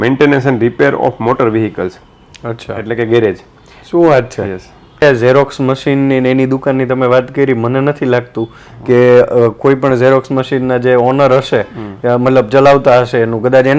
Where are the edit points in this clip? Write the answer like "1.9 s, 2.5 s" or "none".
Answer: 5.0 s